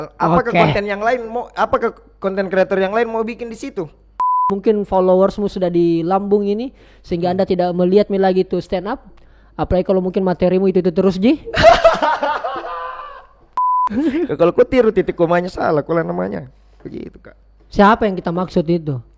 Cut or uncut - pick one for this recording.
cut